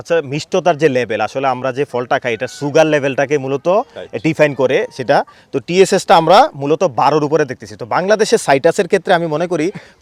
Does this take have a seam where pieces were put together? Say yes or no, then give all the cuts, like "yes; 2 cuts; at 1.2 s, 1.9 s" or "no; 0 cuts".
no; 0 cuts